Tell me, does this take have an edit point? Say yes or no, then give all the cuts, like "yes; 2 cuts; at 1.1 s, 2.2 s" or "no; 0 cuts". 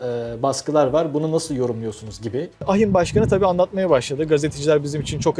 yes; 1 cut; at 2.6 s